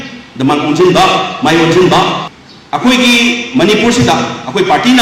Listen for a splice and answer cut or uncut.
uncut